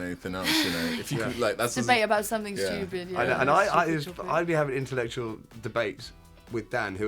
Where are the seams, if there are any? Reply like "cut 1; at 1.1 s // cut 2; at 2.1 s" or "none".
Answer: none